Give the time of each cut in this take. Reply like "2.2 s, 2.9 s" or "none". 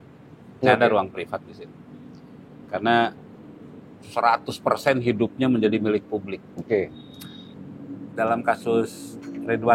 7.5 s